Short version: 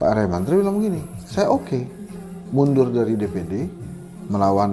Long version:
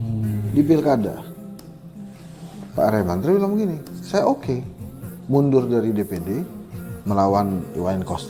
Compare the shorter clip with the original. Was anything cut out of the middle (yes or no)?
no